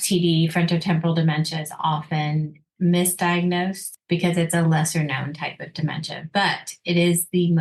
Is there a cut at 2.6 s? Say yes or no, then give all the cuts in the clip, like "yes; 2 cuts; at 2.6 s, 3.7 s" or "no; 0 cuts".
yes; 2 cuts; at 2.6 s, 3.9 s